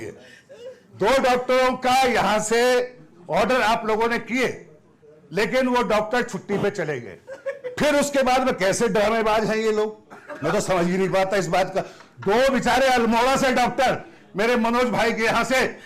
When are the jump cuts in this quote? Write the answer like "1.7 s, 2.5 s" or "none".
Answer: none

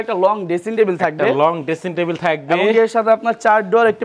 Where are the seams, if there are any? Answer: none

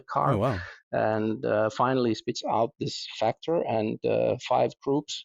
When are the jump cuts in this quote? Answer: none

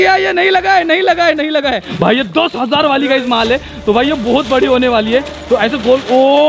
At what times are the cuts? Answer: 1.9 s

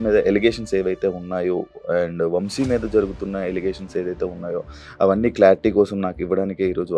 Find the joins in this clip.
none

